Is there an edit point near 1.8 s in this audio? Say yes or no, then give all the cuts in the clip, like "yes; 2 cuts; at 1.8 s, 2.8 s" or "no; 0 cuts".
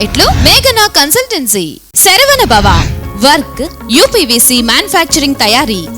yes; 1 cut; at 1.8 s